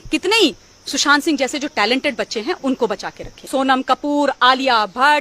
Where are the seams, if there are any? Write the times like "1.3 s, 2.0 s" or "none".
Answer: 3.5 s